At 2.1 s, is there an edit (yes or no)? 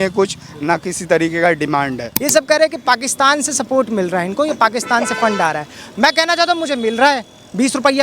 yes